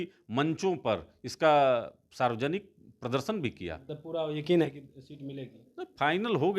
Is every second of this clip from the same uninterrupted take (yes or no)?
no